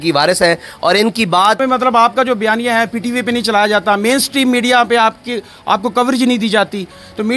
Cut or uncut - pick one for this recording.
cut